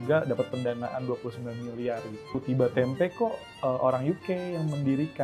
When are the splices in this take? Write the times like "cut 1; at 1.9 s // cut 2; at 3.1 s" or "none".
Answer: cut 1; at 2.4 s